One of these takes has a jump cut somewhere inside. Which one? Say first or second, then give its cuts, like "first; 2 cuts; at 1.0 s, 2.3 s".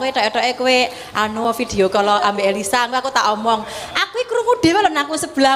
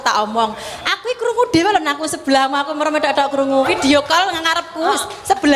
second; 1 cut; at 3.7 s